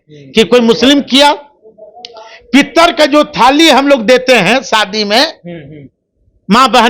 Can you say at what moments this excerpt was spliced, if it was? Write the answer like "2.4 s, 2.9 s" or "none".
none